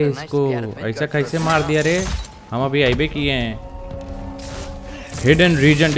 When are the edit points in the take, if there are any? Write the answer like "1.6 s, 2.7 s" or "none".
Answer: none